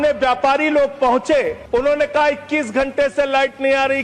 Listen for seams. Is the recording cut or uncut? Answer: cut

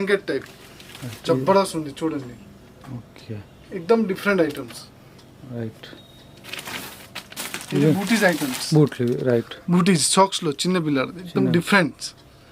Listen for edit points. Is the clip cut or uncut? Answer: uncut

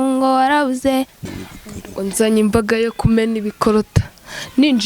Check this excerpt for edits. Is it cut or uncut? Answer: cut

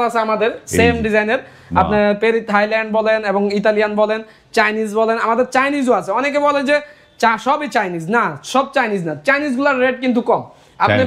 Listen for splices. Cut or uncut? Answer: uncut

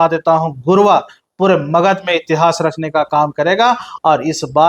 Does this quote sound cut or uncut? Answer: uncut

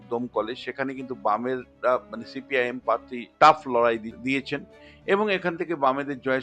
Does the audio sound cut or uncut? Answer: cut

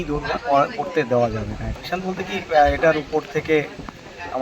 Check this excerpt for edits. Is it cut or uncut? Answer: cut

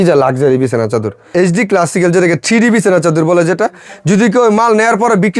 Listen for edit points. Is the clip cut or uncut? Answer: cut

